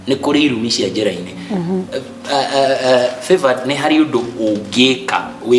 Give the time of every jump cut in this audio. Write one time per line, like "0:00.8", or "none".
none

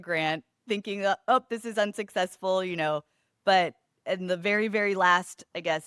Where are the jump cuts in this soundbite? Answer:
none

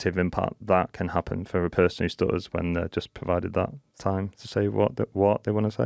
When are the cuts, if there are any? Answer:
none

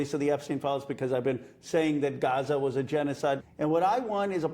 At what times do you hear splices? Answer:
0:03.4

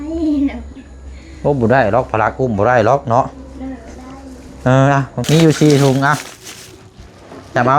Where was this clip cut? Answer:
0:05.2

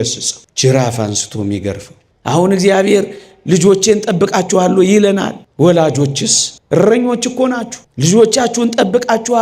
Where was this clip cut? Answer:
0:02.1

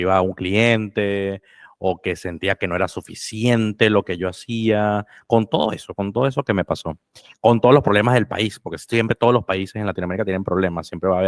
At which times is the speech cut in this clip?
none

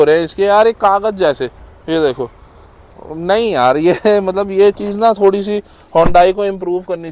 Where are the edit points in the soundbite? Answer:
none

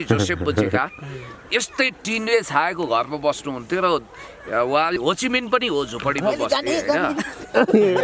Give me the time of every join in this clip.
0:05.0

